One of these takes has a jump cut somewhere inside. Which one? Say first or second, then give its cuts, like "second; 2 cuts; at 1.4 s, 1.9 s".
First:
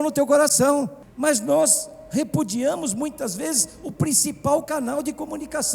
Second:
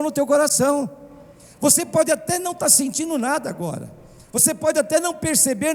first; 1 cut; at 1.0 s